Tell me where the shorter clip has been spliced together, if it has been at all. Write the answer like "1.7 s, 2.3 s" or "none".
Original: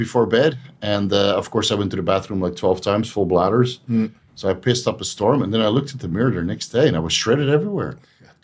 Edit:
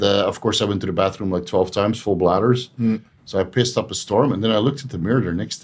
none